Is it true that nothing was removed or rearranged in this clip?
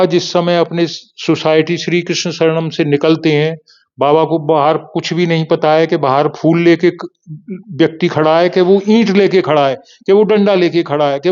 yes; 0 cuts

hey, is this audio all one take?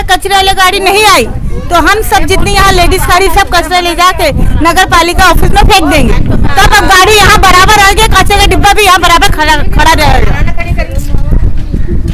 yes; 0 cuts

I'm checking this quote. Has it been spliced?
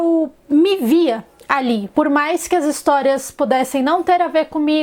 yes; 1 cut; at 1.9 s

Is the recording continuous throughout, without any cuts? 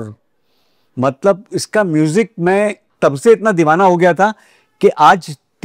yes; 0 cuts

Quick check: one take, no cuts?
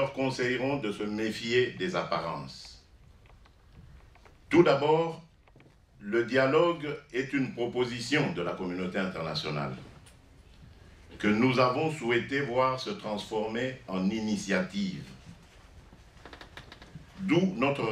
yes; 0 cuts

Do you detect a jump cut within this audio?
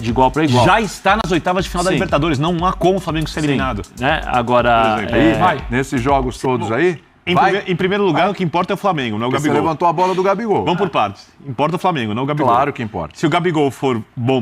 yes; 1 cut; at 5.2 s

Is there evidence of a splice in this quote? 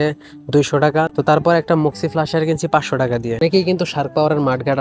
yes; 1 cut; at 3.4 s

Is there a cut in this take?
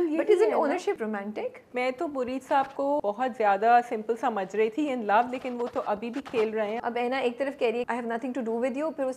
yes; 4 cuts; at 1.2 s, 3.0 s, 6.8 s, 7.9 s

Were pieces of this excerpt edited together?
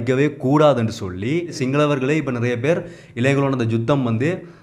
yes; 1 cut; at 1.6 s

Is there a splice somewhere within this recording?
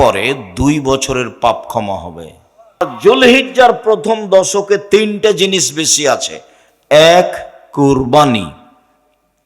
yes; 1 cut; at 2.8 s

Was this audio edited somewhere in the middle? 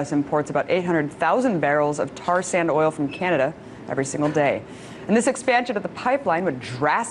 no; 0 cuts

